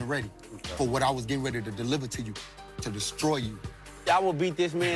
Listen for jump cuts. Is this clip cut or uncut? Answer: cut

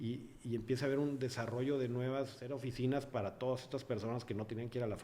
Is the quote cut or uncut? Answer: cut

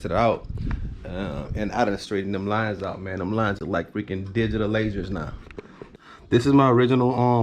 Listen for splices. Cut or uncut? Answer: cut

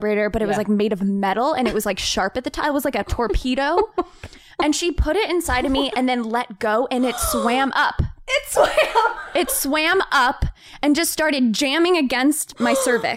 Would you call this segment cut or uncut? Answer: uncut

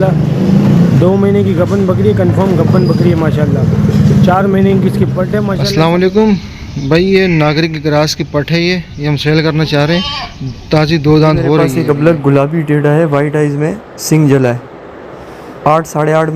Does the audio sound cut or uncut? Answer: cut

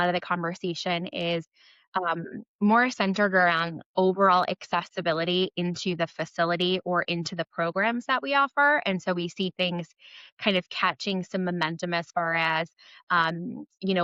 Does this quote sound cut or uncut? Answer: uncut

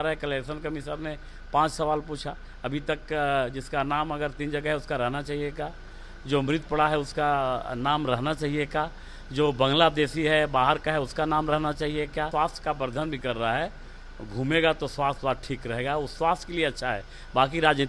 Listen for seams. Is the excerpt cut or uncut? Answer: cut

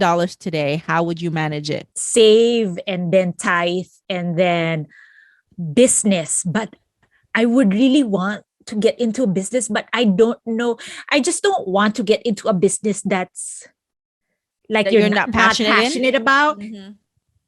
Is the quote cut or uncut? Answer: cut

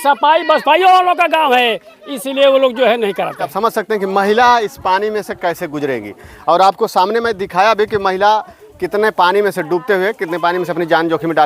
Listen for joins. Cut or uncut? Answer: cut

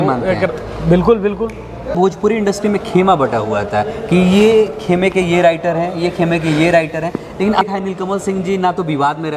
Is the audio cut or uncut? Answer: cut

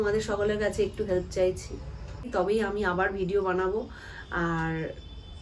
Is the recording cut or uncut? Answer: cut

